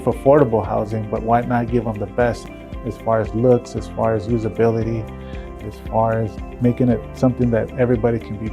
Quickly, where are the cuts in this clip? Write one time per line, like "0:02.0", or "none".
0:02.5
0:05.5
0:06.6